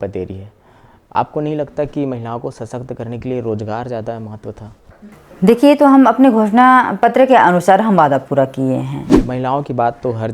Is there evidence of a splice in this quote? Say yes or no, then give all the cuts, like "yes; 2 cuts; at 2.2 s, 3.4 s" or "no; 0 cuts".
yes; 2 cuts; at 4.9 s, 9.1 s